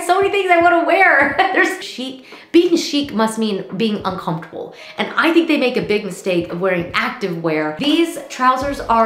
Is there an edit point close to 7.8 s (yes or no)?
yes